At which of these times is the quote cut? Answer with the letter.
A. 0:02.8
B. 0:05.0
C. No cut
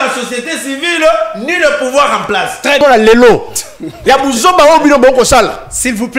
A